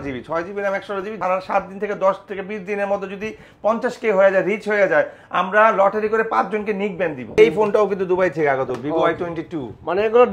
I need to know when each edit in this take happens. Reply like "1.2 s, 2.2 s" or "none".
1.2 s, 7.4 s